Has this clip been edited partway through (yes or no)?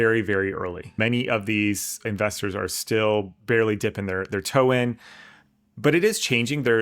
yes